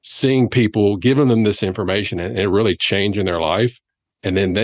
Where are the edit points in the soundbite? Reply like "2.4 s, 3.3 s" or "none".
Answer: none